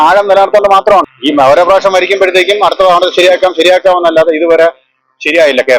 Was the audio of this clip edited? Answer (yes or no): yes